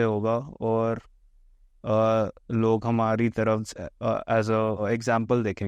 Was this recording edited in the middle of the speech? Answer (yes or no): yes